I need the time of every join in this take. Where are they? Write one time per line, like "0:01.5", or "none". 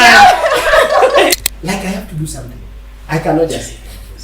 0:01.3